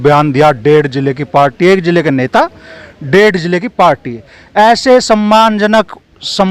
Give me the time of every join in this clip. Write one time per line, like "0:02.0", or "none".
none